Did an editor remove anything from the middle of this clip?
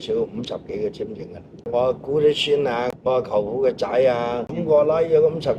yes; 3 cuts; at 1.6 s, 2.9 s, 4.6 s

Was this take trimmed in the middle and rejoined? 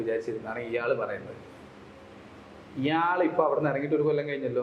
no; 0 cuts

